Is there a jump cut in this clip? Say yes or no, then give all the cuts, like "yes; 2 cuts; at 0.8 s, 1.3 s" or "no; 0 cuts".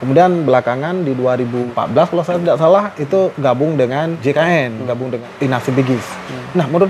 yes; 3 cuts; at 1.7 s, 4.2 s, 5.3 s